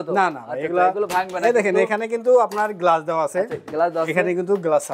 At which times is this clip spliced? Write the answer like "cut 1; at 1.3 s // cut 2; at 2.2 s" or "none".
none

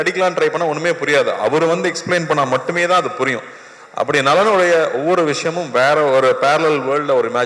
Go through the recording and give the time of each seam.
none

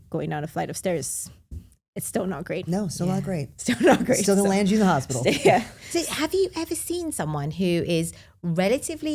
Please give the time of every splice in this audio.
none

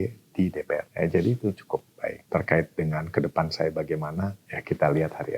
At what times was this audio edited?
cut 1; at 0.9 s // cut 2; at 2.2 s // cut 3; at 4.5 s

